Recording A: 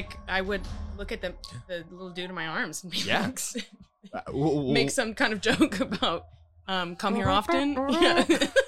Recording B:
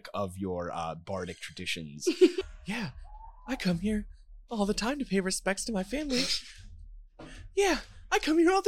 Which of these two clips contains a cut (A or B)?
B